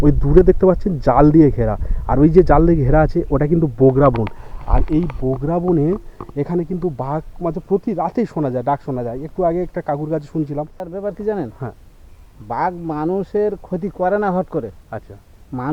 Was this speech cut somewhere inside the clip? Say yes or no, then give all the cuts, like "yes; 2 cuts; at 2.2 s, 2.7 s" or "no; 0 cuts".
yes; 1 cut; at 10.9 s